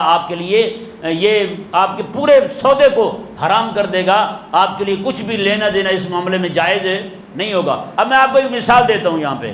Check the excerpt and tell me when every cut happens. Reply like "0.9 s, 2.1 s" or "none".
none